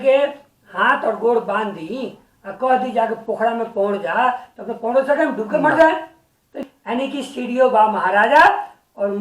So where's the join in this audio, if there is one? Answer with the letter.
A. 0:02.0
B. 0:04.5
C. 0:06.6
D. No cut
C